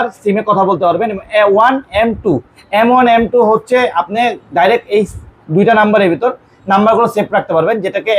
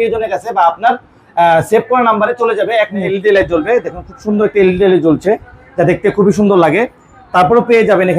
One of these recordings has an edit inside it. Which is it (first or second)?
second